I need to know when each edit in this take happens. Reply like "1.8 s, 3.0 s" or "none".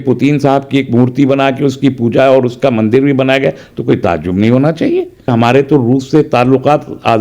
5.3 s